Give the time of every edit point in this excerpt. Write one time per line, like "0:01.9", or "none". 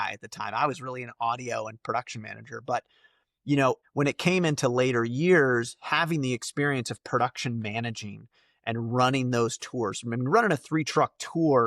0:03.8